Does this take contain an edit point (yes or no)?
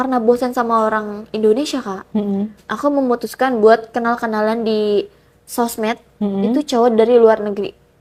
no